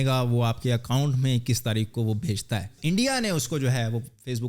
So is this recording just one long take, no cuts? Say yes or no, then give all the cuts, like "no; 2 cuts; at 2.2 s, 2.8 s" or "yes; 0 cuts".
no; 1 cut; at 2.7 s